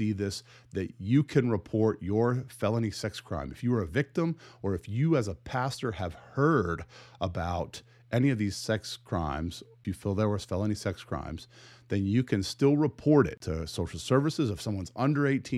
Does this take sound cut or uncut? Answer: cut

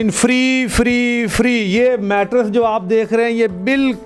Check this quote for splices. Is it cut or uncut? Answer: uncut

